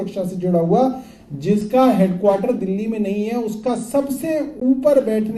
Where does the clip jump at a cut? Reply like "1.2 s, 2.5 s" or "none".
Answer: none